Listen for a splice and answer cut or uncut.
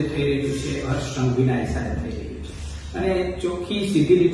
uncut